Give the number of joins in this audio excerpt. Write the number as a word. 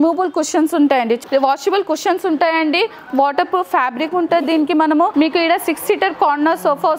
two